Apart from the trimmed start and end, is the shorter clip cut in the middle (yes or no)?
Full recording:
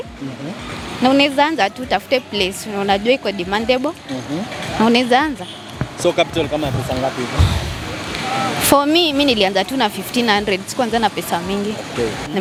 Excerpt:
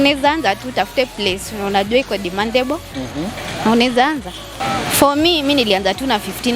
yes